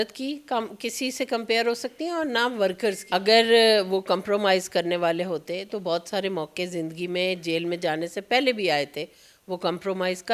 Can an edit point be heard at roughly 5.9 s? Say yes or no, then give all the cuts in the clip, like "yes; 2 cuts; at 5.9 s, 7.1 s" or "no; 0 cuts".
no; 1 cut; at 3.0 s